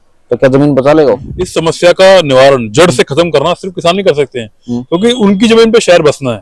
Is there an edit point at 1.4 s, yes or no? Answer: yes